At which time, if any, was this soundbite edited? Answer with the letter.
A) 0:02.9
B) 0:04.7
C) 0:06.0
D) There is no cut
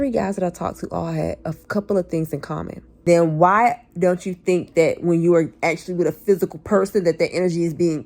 A